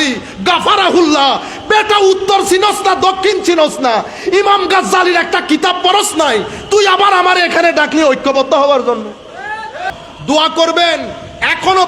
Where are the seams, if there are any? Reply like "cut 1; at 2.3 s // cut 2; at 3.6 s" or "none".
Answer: cut 1; at 9.9 s